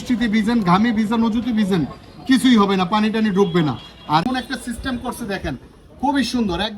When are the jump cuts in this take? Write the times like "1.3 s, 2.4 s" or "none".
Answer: 4.3 s